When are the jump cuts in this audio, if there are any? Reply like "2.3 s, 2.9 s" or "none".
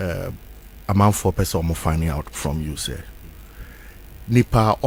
none